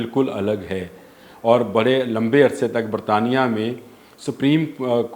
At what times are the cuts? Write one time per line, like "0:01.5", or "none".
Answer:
none